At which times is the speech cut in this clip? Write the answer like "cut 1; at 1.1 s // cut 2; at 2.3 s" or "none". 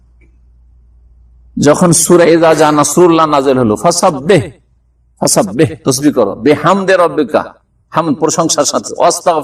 none